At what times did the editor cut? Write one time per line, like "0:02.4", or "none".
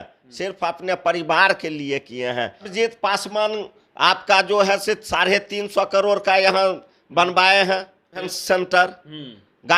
0:02.7
0:08.3